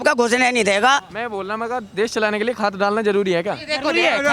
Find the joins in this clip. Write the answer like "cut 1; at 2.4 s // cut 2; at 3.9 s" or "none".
cut 1; at 1.1 s

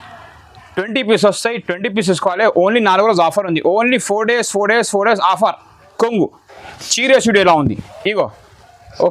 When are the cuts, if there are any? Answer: cut 1; at 5.8 s

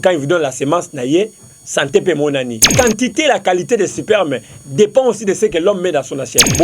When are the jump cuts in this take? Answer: cut 1; at 2.7 s

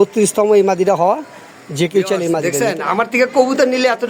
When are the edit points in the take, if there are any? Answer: cut 1; at 2.4 s

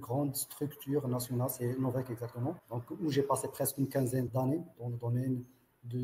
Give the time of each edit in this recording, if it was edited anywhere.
cut 1; at 2.7 s // cut 2; at 4.3 s

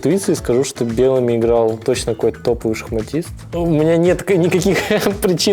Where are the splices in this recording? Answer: cut 1; at 3.4 s

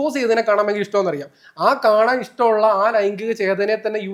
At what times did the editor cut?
none

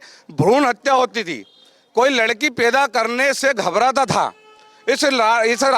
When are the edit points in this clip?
none

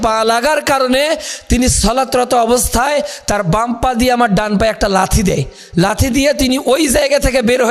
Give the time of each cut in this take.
none

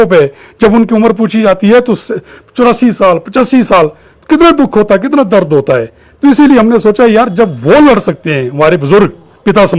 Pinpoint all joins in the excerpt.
none

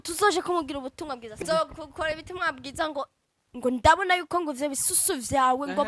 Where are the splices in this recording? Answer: cut 1; at 1.4 s

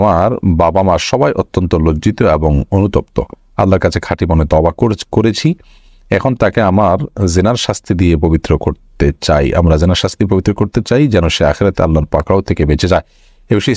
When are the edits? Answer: none

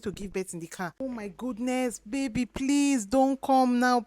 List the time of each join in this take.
cut 1; at 0.9 s

